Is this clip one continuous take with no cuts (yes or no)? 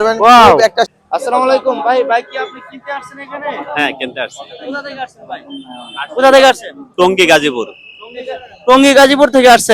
no